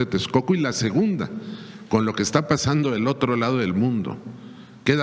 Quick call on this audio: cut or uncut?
uncut